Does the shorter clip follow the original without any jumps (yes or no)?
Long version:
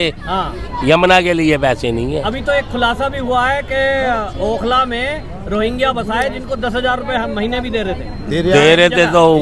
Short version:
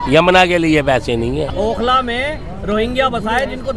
no